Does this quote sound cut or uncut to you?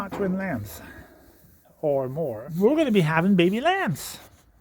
cut